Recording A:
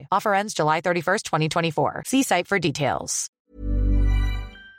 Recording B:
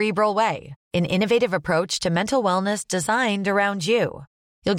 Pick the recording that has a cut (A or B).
A